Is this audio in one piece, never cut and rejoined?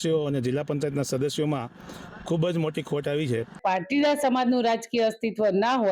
no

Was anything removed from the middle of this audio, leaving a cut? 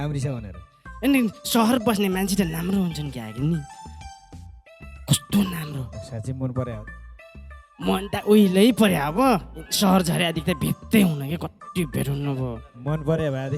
no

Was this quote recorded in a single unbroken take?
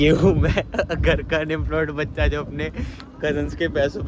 yes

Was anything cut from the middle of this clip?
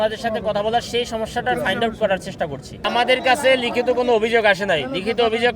yes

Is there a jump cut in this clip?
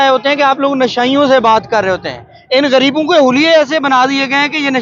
no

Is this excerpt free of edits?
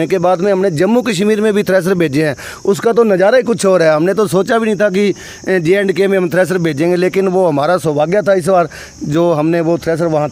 yes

